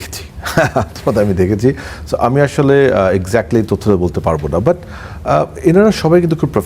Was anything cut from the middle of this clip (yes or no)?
no